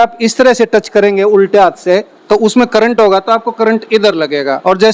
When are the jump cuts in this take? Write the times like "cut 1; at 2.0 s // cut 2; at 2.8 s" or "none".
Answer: none

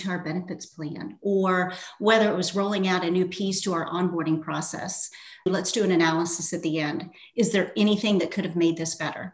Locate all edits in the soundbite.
cut 1; at 5.5 s

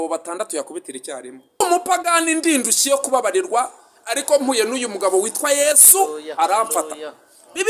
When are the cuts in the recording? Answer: cut 1; at 1.6 s

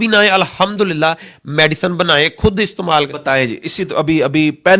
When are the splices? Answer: none

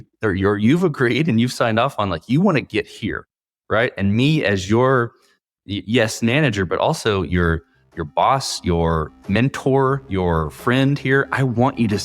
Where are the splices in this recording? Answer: cut 1; at 9.2 s

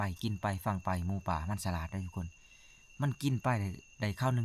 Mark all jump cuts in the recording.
none

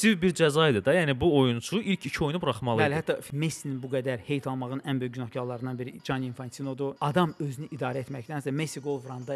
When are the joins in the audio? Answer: cut 1; at 3.3 s // cut 2; at 7.0 s

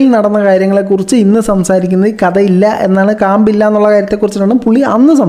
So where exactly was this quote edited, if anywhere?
none

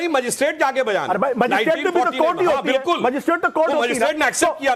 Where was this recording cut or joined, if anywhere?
none

